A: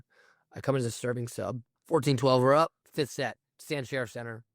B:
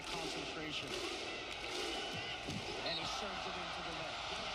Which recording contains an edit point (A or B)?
A